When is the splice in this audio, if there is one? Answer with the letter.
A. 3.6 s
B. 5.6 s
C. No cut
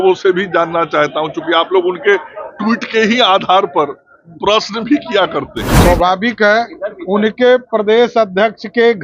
B